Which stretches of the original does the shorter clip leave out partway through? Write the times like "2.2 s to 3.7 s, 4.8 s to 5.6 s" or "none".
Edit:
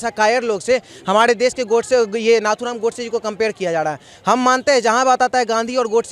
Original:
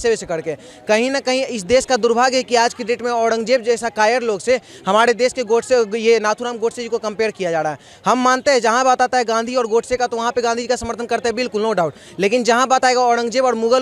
none